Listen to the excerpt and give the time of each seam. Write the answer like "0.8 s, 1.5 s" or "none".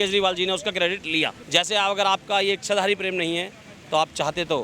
1.4 s

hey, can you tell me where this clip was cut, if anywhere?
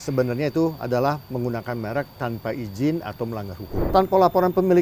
3.7 s

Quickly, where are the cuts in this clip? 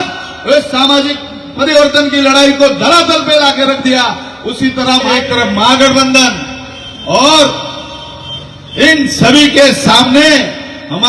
5.1 s

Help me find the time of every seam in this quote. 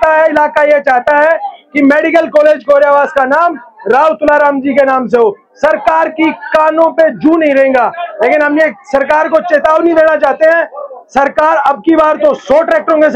none

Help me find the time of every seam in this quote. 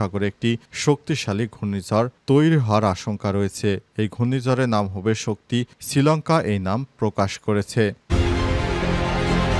8.1 s

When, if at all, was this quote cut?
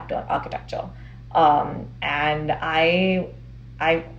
none

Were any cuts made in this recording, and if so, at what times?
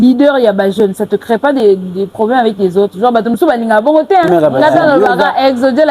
4.3 s

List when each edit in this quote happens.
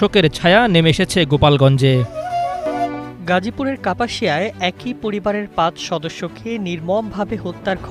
2.6 s

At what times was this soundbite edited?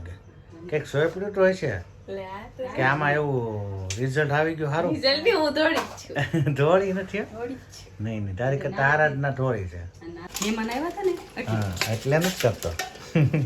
10.3 s

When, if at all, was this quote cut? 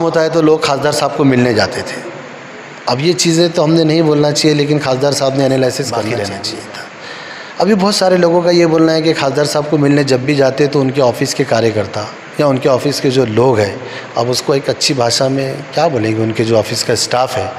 6.0 s

